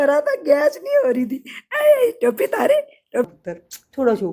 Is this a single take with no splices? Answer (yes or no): no